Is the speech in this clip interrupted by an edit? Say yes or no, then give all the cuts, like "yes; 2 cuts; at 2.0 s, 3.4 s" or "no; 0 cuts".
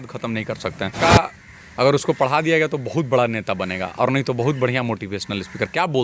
yes; 1 cut; at 1.0 s